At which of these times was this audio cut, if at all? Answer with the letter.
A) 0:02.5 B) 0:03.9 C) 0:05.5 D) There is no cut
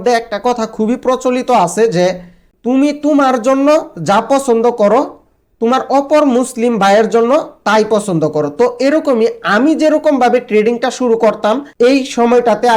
D